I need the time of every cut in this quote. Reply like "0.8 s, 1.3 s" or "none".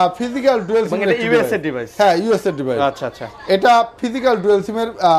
none